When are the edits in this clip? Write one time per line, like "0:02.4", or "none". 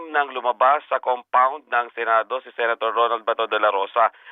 none